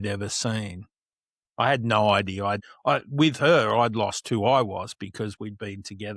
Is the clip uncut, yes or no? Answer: no